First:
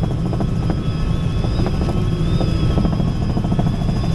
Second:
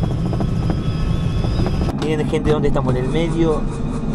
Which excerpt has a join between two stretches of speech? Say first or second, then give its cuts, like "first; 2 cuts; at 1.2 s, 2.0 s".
second; 1 cut; at 1.9 s